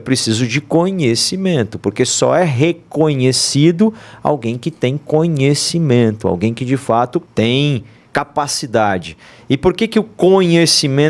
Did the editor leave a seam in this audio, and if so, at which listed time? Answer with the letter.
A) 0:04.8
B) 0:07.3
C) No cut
B